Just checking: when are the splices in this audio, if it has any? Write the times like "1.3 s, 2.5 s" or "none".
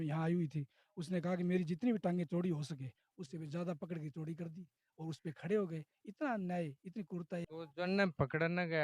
7.4 s